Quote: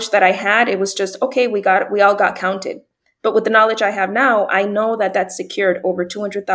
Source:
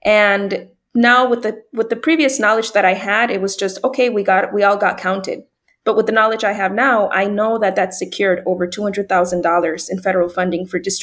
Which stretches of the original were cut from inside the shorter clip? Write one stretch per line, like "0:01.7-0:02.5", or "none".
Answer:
none